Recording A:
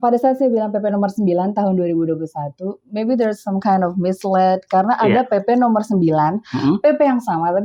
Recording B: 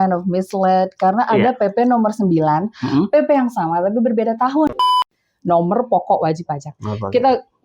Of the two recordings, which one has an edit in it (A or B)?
B